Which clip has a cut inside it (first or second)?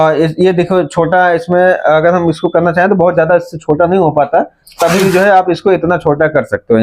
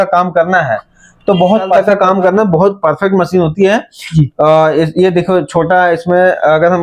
second